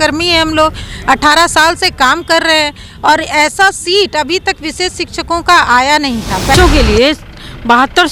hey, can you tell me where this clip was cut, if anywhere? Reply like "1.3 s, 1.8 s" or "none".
6.5 s